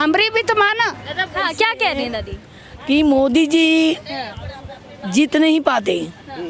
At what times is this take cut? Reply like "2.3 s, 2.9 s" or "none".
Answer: 1.4 s